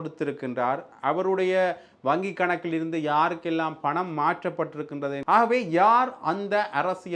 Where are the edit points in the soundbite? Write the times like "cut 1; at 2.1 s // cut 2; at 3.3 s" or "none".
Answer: cut 1; at 5.2 s